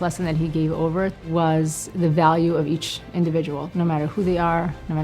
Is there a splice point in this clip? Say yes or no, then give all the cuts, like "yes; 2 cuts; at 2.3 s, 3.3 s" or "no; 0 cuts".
yes; 3 cuts; at 1.2 s, 1.8 s, 3.6 s